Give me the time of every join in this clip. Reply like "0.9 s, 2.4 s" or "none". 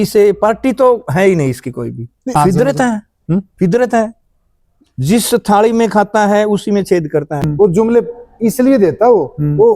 2.3 s, 7.4 s